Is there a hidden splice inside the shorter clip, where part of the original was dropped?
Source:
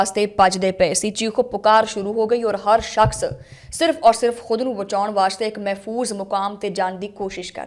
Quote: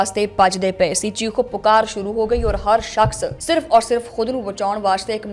yes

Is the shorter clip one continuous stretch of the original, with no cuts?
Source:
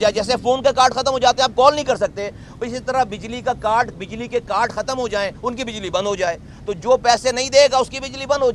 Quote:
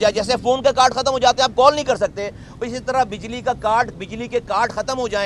yes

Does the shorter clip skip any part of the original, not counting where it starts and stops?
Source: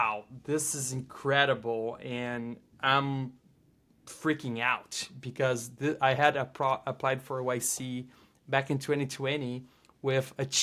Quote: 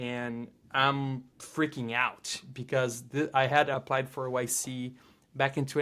yes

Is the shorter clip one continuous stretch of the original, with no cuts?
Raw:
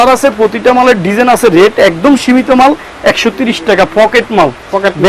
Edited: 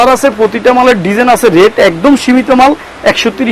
yes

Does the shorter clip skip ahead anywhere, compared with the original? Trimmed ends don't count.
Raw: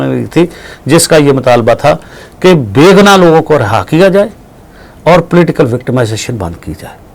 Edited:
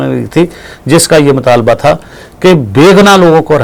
no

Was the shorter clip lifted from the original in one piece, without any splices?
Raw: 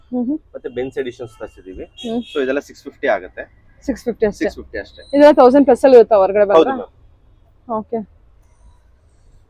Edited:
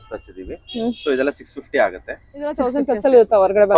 no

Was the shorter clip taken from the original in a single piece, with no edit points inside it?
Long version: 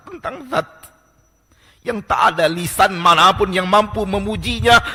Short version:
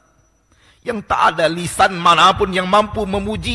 yes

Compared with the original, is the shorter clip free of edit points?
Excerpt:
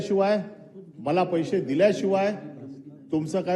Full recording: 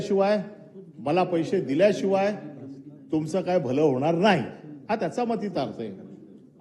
yes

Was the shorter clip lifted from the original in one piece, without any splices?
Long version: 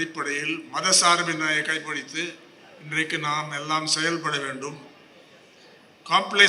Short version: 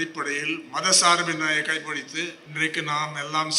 no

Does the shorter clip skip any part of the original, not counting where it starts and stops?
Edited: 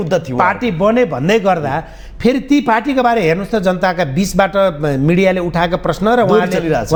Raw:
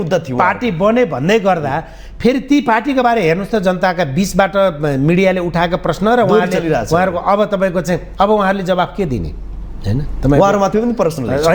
no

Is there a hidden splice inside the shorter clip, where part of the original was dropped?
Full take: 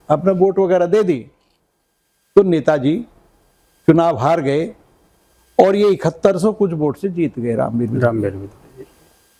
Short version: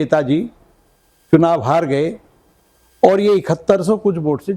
no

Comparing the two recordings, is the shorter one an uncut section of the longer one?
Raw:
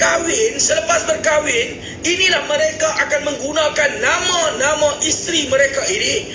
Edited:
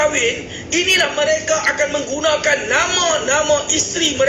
yes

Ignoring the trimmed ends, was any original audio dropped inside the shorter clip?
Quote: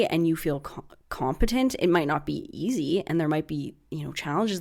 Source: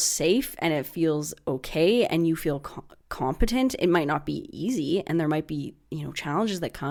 no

